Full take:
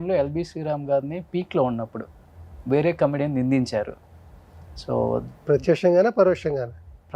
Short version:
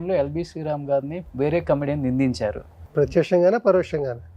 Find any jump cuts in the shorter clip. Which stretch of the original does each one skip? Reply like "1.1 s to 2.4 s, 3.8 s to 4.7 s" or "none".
1.2 s to 2.5 s, 4.1 s to 5.3 s